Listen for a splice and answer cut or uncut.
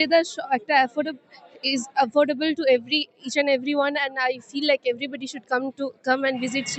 uncut